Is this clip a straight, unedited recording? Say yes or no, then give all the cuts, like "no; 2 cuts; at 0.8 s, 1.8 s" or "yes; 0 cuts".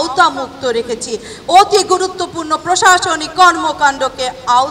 yes; 0 cuts